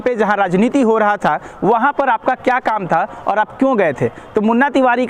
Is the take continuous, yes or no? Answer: yes